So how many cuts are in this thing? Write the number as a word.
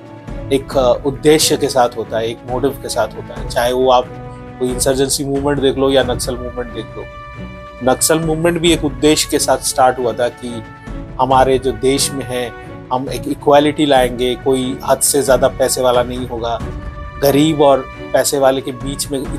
zero